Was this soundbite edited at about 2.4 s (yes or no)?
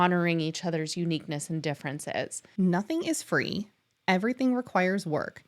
yes